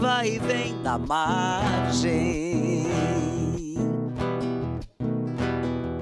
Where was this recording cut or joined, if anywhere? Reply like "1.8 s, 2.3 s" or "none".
none